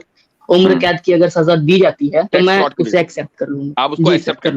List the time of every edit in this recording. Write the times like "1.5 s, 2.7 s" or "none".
2.3 s, 3.7 s